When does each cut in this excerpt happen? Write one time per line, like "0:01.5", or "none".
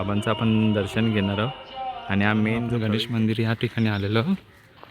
0:02.7